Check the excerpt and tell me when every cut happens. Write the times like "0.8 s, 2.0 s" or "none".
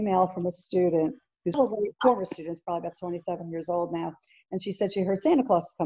1.6 s